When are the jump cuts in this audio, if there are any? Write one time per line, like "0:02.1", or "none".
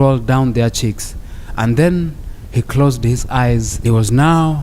0:03.7